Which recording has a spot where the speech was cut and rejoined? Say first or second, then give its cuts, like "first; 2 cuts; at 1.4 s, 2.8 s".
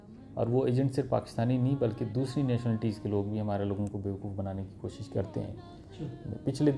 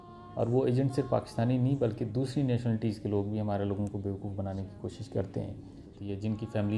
second; 1 cut; at 5.9 s